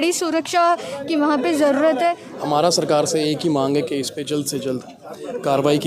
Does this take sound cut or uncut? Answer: cut